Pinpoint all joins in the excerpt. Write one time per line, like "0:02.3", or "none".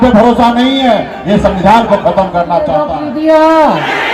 0:02.9